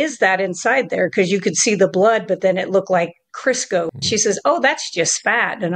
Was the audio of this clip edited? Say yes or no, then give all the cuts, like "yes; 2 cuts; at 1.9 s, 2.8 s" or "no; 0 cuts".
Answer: yes; 1 cut; at 3.9 s